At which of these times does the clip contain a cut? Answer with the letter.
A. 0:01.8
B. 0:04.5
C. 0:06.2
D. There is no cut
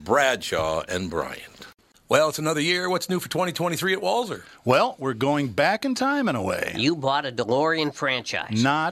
A